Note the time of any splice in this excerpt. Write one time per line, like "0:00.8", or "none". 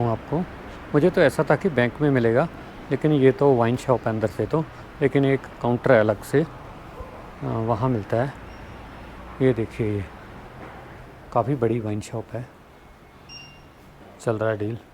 0:13.9